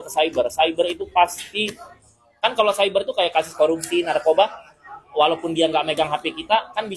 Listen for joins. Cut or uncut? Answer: uncut